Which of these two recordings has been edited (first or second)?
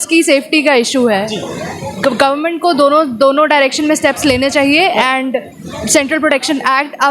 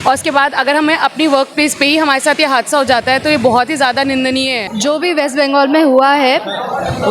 second